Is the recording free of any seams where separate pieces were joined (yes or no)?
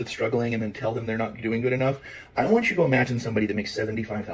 yes